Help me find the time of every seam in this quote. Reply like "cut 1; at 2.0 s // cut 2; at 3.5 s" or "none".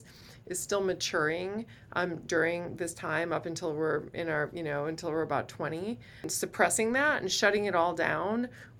cut 1; at 6.3 s